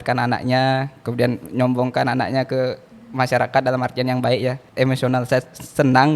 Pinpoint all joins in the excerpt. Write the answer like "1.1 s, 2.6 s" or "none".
4.6 s